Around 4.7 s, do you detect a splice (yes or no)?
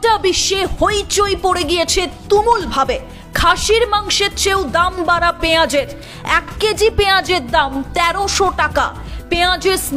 no